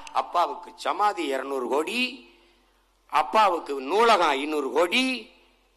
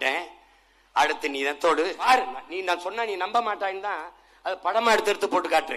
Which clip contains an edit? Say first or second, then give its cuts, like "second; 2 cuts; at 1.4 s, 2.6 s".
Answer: second; 1 cut; at 2.0 s